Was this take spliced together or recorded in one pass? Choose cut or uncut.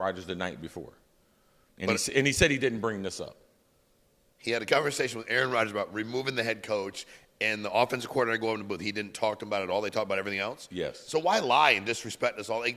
uncut